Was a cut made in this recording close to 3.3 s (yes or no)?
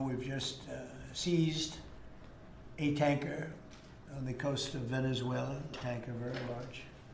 no